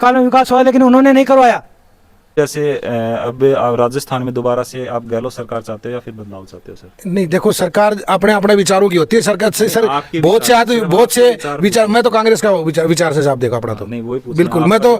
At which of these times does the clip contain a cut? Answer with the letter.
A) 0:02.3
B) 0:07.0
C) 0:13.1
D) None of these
A